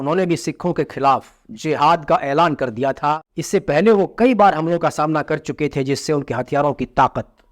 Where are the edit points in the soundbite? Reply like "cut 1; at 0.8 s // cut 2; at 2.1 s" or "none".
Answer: cut 1; at 3.3 s